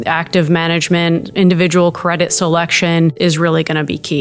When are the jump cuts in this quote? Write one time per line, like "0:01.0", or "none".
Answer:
0:03.2